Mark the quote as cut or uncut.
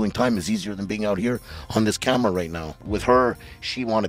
cut